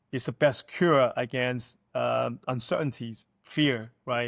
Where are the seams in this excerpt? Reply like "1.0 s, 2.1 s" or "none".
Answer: none